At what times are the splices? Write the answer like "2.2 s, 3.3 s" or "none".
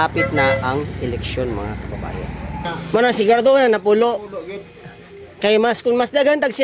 2.6 s